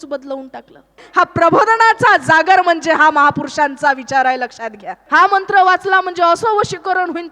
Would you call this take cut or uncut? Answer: cut